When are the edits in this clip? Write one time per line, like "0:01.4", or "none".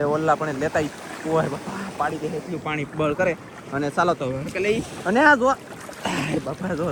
none